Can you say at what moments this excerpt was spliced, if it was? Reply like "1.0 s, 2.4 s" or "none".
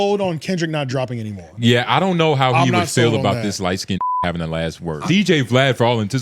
5.0 s